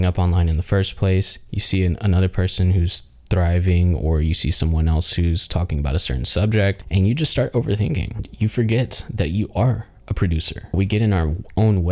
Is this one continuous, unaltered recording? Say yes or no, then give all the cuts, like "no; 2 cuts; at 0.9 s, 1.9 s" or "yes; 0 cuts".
no; 3 cuts; at 6.8 s, 8.3 s, 10.7 s